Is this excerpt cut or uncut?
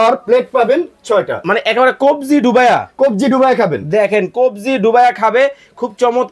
uncut